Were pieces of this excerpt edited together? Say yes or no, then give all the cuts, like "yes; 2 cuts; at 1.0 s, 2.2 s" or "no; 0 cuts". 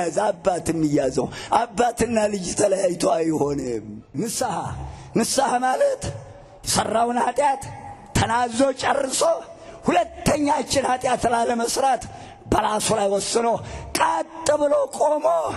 yes; 1 cut; at 4.0 s